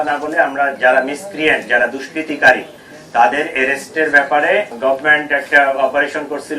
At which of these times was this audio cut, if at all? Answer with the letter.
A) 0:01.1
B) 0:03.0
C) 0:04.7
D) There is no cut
C